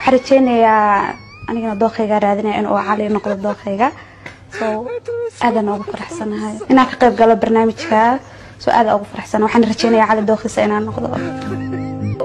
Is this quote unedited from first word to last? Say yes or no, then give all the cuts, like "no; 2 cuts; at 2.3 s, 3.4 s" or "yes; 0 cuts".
yes; 0 cuts